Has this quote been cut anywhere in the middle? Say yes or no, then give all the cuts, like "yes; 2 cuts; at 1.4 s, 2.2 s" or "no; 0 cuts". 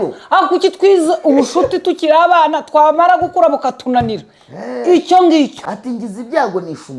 yes; 1 cut; at 5.6 s